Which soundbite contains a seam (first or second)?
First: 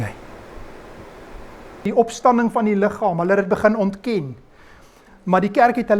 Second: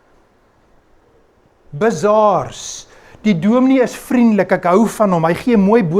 first